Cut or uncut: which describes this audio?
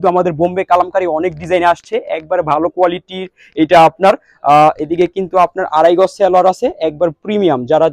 uncut